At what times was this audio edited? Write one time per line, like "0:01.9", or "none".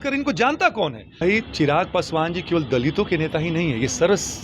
0:01.2